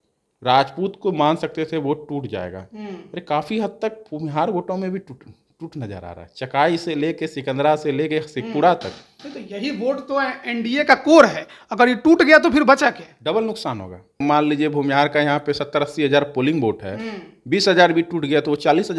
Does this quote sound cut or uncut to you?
cut